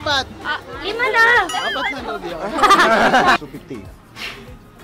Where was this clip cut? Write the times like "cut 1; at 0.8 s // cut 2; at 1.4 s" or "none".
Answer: cut 1; at 3.4 s